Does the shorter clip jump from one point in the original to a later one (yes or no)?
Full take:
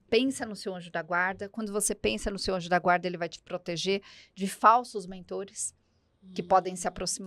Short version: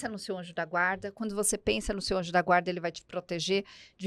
no